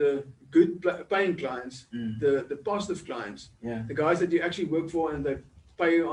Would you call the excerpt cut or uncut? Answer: uncut